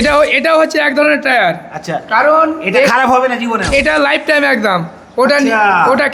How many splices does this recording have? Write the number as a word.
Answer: zero